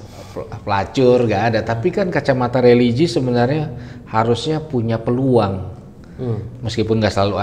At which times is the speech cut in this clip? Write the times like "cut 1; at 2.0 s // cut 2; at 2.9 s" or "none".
none